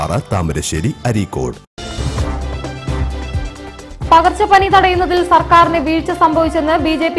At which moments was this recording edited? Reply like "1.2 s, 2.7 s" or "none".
1.8 s, 3.5 s